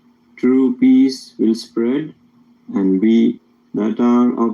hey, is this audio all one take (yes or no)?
no